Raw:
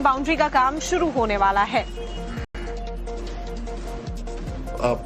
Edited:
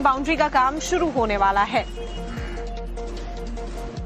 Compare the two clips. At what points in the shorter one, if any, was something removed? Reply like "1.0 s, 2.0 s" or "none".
2.5 s

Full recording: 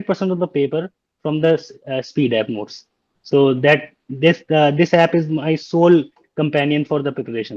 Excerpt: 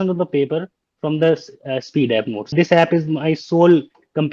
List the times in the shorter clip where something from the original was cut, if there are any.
2.5 s

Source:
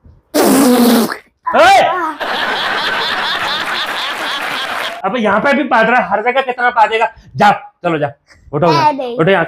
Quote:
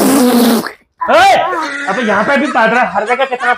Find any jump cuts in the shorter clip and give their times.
1.7 s

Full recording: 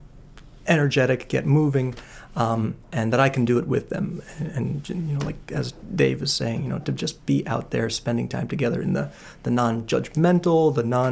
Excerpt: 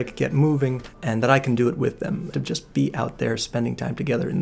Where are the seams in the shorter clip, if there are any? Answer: 0.9 s, 2.3 s

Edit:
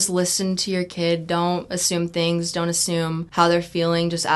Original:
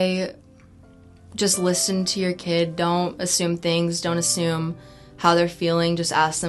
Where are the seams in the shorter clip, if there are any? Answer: 3.2 s

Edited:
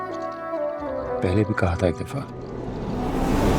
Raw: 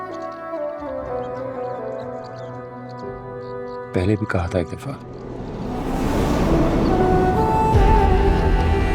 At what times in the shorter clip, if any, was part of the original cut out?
1.2 s

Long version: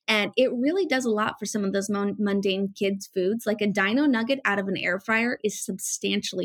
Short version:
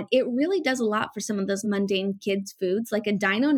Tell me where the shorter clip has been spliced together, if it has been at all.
1.6 s

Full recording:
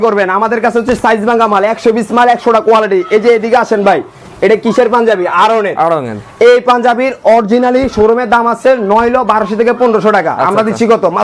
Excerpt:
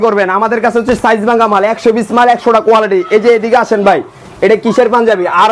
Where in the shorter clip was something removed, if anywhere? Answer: none

